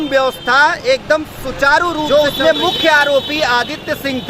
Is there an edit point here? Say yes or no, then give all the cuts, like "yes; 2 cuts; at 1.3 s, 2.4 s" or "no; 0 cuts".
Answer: yes; 1 cut; at 2.1 s